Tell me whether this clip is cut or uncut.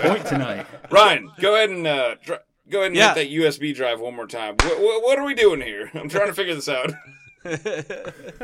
uncut